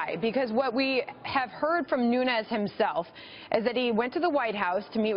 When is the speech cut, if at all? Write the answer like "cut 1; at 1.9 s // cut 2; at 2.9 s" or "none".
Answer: none